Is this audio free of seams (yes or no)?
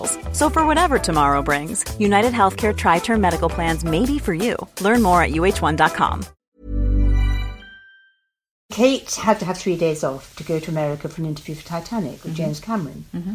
no